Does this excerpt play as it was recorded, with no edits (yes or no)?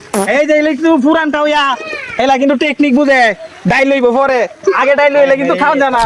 yes